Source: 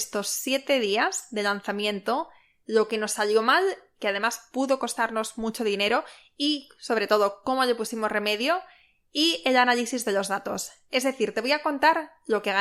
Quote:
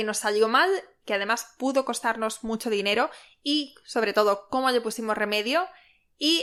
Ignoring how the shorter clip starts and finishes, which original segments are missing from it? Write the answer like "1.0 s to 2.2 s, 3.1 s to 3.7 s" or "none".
none

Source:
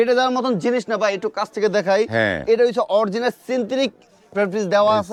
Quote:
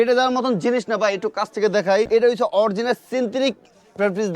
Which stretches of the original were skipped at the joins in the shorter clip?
2.1 s to 2.4 s

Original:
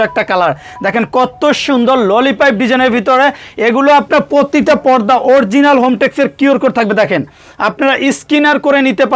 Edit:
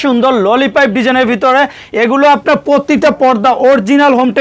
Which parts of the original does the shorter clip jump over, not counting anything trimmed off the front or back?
none

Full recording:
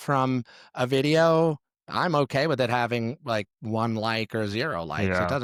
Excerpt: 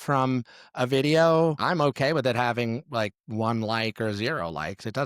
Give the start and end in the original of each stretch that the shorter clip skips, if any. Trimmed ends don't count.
1.6 s to 1.9 s

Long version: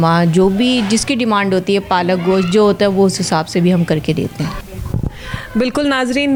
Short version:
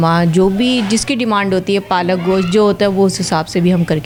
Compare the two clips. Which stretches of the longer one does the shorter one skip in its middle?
none

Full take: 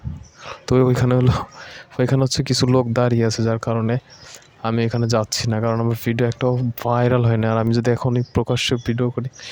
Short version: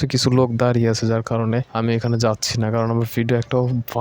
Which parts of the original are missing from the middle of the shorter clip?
4.0 s to 4.6 s

